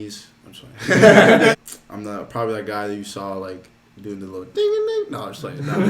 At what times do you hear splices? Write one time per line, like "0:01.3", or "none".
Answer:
0:01.6